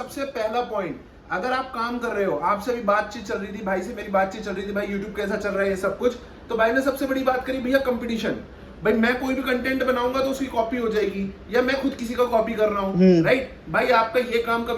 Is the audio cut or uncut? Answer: uncut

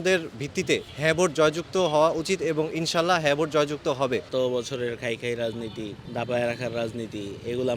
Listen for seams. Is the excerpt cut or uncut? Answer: cut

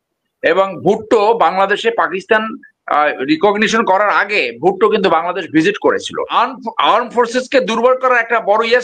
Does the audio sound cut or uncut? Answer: cut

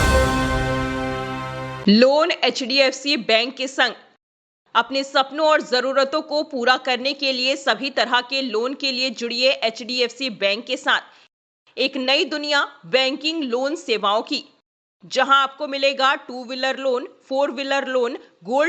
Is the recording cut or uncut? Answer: cut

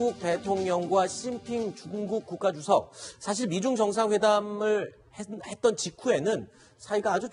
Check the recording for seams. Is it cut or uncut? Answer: uncut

